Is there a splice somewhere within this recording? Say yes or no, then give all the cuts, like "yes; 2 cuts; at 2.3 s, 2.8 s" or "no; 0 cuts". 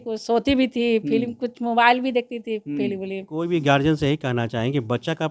yes; 1 cut; at 3.4 s